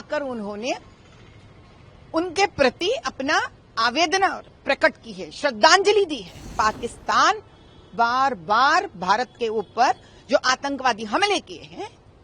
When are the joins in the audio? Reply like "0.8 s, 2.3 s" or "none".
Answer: 6.5 s